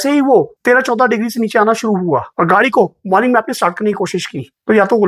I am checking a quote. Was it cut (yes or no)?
no